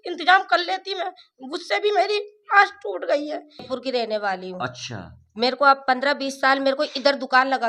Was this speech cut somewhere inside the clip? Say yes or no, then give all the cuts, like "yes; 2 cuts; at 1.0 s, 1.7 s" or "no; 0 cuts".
yes; 1 cut; at 3.7 s